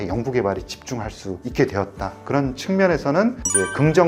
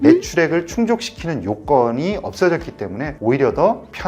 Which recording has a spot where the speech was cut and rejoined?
second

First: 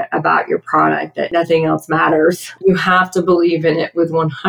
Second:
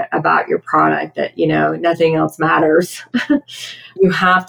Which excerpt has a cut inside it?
first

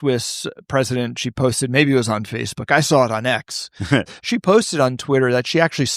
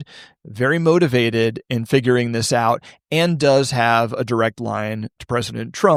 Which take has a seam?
first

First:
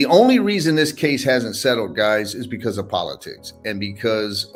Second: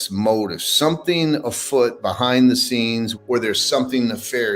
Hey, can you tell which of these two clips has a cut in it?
second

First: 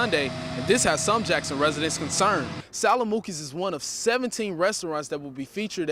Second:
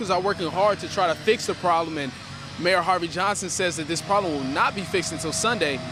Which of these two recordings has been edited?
first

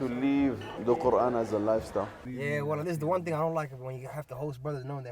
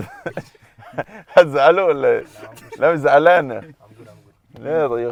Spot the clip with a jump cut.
first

